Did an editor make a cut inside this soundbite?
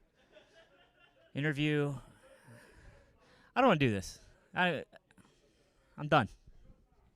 no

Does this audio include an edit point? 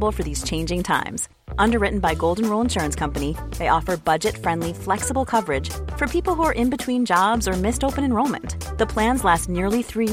no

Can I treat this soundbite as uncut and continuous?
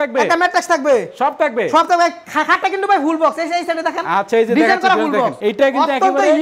yes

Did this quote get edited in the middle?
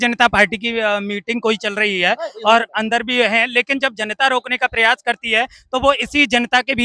no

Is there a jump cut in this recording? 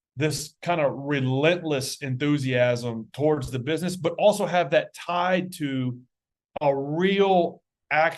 no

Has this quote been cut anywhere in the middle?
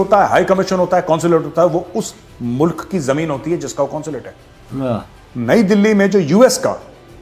no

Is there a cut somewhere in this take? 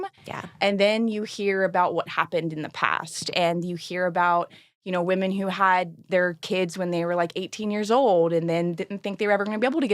no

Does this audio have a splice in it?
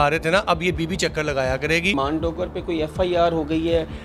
yes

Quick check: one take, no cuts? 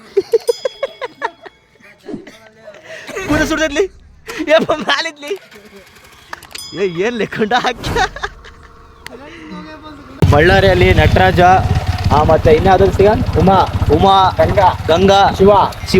no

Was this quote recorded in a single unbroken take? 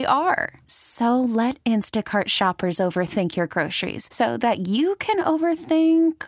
yes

